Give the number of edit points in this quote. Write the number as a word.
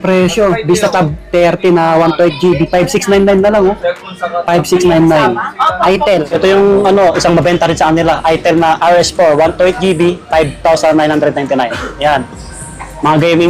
one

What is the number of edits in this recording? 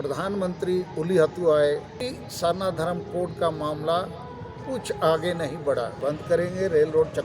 two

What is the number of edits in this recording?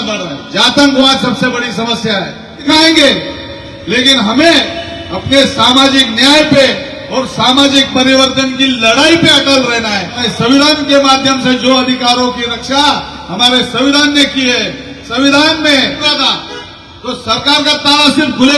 three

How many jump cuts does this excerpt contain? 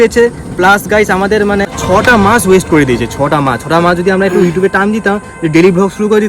one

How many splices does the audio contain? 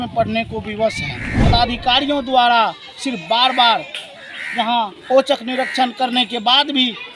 one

